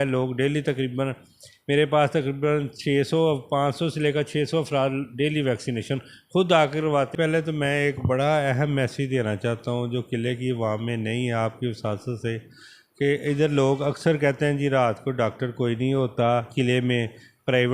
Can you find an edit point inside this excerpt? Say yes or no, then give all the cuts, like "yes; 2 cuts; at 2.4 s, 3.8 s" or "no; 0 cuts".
yes; 1 cut; at 7.1 s